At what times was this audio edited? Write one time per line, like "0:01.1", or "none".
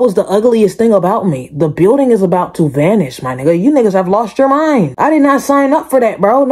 none